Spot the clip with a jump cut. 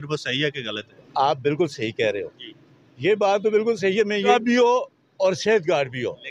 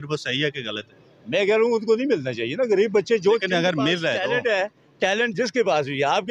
first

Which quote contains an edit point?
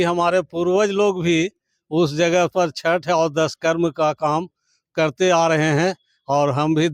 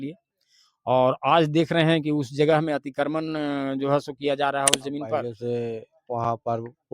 second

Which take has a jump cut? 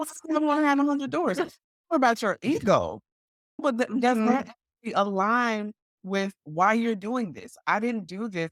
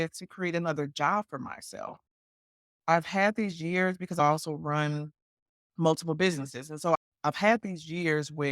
second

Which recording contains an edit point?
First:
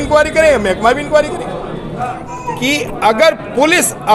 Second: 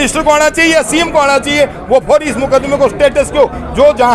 first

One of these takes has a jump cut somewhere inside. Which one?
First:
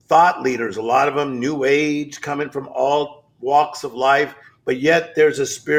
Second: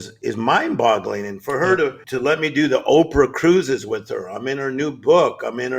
second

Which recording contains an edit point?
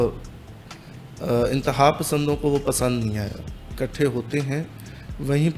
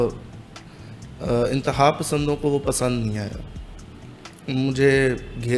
first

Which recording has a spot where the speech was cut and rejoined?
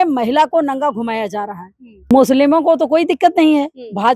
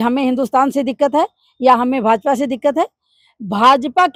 first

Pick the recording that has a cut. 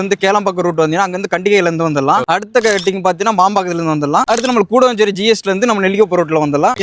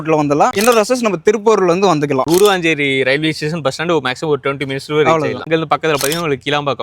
second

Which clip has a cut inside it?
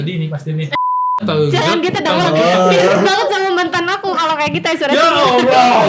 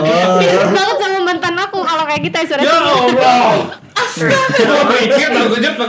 first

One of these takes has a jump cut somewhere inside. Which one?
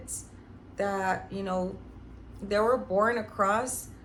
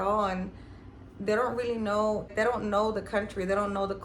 second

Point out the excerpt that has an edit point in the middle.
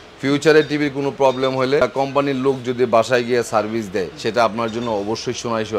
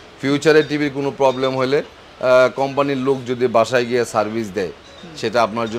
first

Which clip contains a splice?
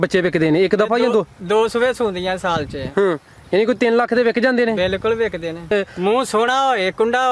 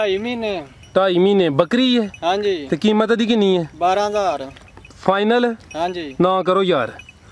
first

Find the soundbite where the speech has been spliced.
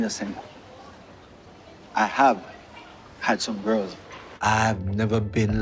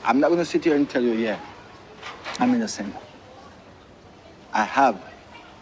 first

